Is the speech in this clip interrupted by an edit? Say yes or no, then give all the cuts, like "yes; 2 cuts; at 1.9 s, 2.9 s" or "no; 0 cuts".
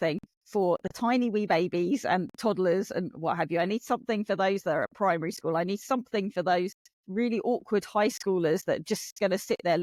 no; 0 cuts